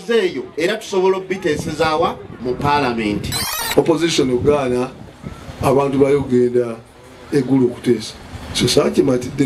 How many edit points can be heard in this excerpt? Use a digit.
1